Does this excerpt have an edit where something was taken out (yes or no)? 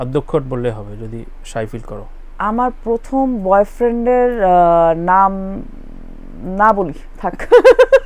no